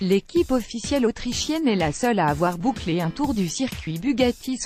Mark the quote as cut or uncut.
uncut